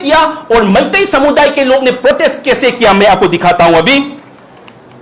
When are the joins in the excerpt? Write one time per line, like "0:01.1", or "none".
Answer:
none